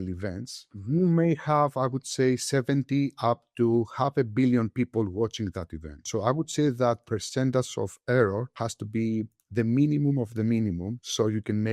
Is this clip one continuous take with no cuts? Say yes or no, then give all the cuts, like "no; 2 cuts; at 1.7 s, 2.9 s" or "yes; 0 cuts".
yes; 0 cuts